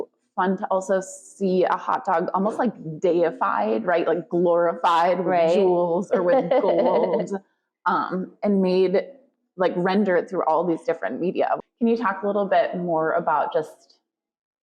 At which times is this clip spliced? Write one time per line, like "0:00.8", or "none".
0:11.6